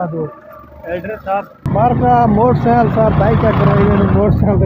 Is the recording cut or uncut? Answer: cut